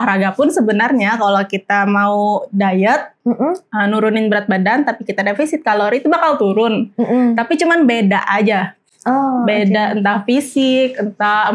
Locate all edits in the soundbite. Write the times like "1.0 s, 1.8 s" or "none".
none